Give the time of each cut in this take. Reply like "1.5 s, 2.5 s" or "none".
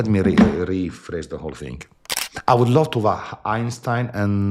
1.9 s

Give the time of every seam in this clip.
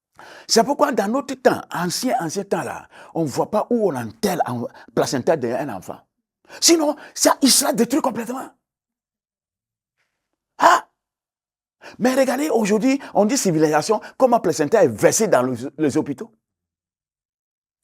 none

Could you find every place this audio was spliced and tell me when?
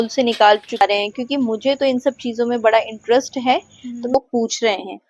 0.8 s, 4.2 s

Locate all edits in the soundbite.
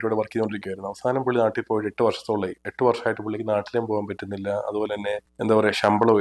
5.3 s

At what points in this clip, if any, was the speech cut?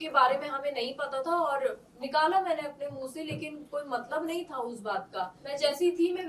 5.4 s

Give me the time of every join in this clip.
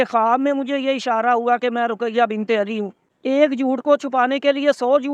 3.1 s

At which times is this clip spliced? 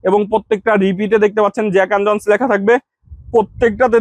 none

